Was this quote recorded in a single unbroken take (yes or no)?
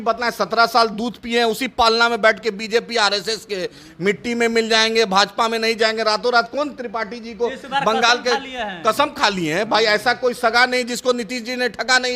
yes